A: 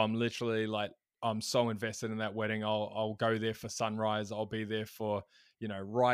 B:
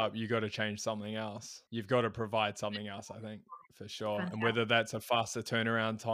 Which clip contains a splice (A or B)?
B